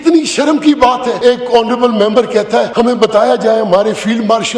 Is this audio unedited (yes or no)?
no